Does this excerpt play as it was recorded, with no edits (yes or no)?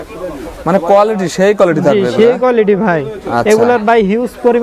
yes